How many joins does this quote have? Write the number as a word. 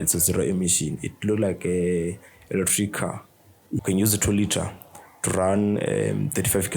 one